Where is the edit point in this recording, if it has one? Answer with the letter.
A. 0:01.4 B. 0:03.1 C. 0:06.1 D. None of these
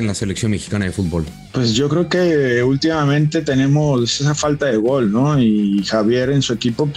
A